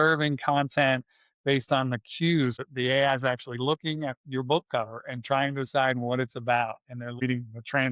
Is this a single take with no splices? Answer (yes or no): no